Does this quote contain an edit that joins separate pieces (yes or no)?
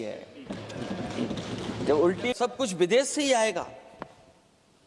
yes